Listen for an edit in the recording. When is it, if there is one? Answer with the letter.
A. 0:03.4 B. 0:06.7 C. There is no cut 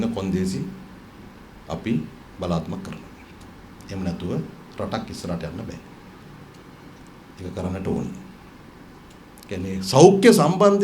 C